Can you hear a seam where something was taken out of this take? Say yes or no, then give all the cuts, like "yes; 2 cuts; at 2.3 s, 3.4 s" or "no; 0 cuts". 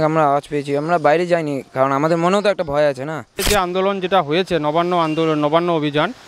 yes; 1 cut; at 3.4 s